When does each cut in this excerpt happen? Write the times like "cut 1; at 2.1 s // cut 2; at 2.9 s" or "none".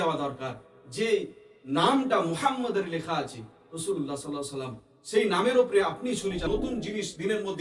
cut 1; at 6.5 s